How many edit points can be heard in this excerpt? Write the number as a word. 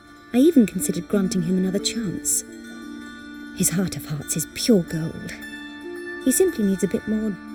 zero